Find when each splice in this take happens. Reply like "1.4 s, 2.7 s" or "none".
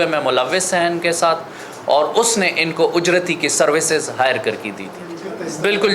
none